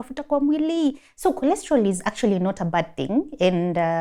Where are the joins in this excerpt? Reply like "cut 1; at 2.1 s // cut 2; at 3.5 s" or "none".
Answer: none